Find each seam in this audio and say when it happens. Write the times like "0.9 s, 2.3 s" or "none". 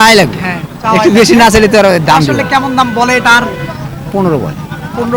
none